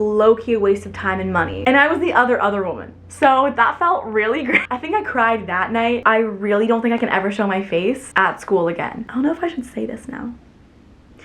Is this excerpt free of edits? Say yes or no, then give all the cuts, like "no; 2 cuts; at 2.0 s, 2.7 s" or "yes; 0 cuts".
no; 4 cuts; at 1.6 s, 4.7 s, 6.0 s, 9.0 s